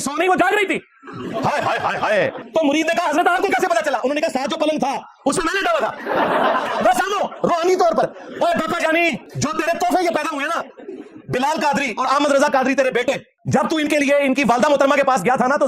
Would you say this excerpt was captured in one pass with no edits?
no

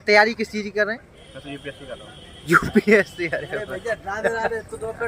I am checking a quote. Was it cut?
no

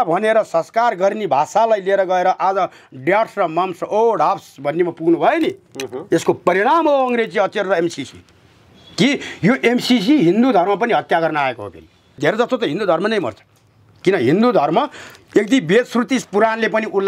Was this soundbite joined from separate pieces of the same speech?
yes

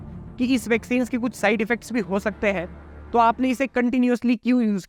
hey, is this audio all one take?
yes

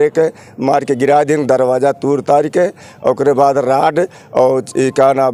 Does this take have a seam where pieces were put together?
no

